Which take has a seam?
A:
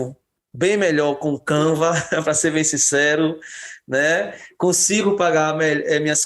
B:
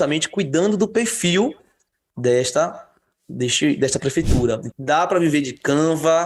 B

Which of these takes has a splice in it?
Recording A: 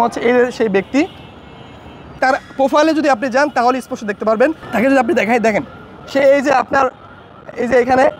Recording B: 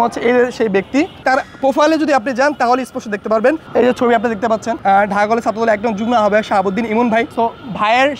B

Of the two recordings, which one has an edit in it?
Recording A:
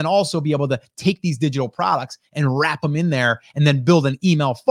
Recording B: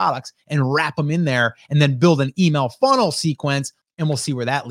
B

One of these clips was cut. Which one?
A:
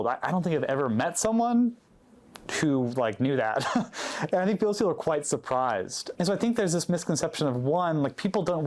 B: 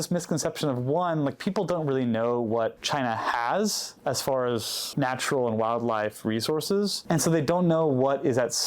B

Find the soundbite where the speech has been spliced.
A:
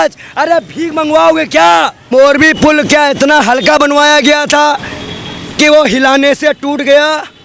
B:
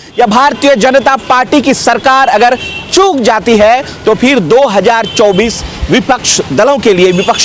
A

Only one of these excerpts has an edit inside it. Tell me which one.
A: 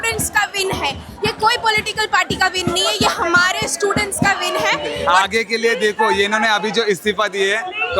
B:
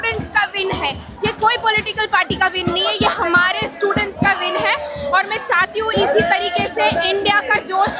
A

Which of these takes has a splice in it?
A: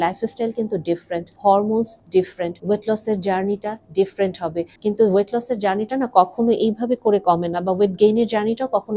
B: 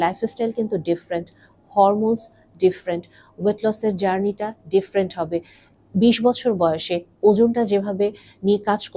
A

